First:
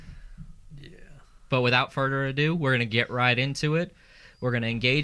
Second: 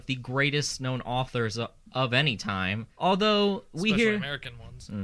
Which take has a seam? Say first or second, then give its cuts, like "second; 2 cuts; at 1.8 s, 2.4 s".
second; 1 cut; at 2.9 s